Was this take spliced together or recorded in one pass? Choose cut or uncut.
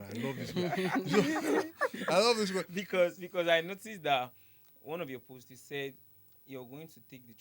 uncut